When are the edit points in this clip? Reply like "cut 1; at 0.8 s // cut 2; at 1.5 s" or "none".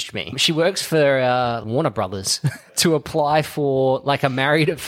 none